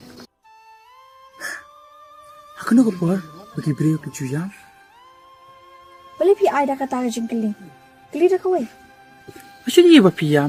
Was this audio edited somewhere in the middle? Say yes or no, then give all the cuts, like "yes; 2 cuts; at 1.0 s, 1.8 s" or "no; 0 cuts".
no; 0 cuts